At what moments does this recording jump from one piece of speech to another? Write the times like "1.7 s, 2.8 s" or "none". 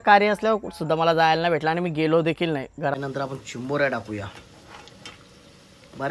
2.9 s